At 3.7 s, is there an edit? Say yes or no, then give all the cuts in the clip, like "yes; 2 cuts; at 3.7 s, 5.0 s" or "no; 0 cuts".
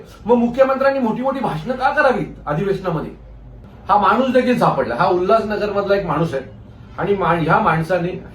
yes; 1 cut; at 3.7 s